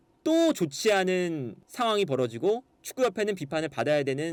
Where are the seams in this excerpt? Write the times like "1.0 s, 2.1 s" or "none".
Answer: none